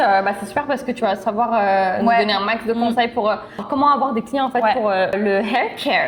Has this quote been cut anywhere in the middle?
yes; 2 cuts; at 3.6 s, 5.1 s

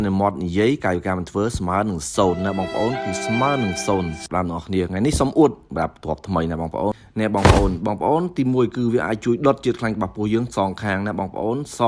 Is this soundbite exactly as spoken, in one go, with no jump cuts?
no; 2 cuts; at 4.2 s, 7.0 s

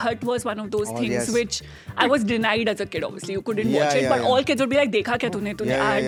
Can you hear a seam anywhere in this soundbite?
no; 0 cuts

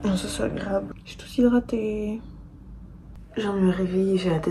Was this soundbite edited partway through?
yes; 1 cut; at 3.2 s

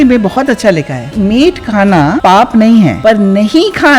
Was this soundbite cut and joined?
yes; 3 cuts; at 1.1 s, 2.2 s, 3.0 s

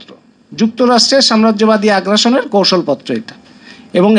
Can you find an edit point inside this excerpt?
no; 0 cuts

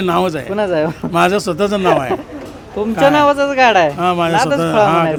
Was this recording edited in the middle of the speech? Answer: no; 0 cuts

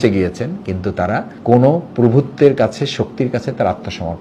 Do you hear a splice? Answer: yes; 1 cut; at 1.3 s

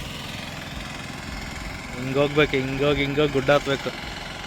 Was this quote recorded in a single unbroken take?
yes; 0 cuts

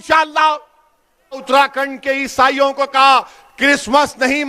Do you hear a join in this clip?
yes; 1 cut; at 1.4 s

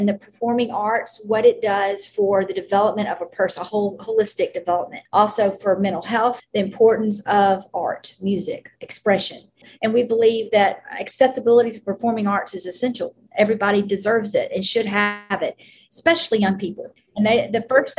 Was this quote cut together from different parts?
yes; 4 cuts; at 5.0 s, 6.4 s, 9.7 s, 16.9 s

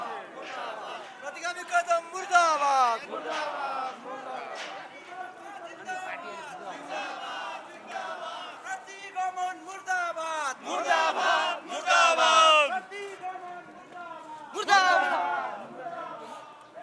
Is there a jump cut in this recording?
no; 0 cuts

